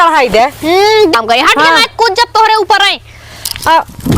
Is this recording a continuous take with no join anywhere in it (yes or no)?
no